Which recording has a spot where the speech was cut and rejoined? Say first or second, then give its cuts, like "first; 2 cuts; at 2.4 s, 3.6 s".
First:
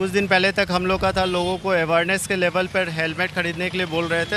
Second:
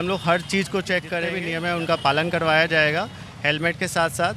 second; 1 cut; at 1.4 s